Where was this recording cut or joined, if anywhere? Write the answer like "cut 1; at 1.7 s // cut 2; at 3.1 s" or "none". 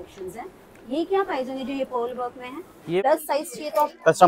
cut 1; at 3.0 s

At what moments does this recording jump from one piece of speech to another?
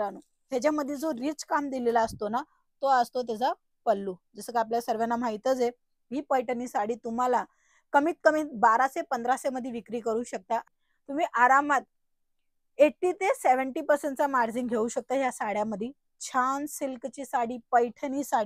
cut 1; at 10.7 s

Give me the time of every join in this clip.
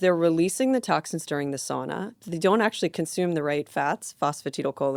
none

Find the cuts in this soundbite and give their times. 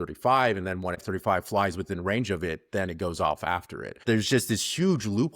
cut 1; at 1.0 s // cut 2; at 4.0 s

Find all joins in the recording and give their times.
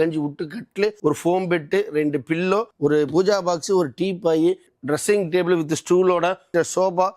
cut 1; at 1.0 s // cut 2; at 2.7 s // cut 3; at 4.6 s

